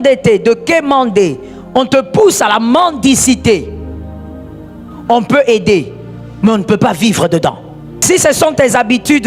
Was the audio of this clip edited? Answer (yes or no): yes